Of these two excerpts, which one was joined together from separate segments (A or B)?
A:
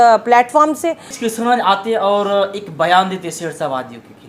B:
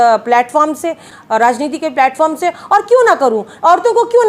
A